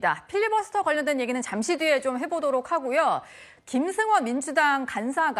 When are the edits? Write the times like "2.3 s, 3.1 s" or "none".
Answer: none